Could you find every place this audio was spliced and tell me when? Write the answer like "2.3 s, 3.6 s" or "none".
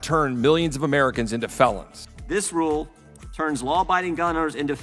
none

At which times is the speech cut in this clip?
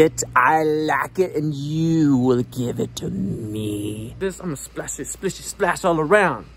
4.2 s

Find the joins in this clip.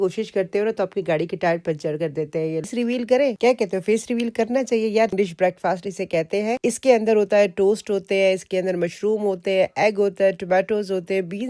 2.7 s, 5.1 s

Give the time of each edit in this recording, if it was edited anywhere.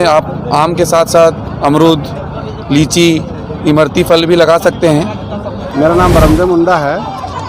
5.7 s

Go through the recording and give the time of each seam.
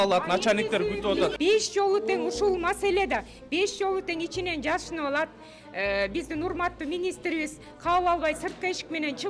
1.4 s

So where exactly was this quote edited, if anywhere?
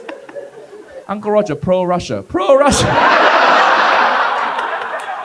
1.0 s

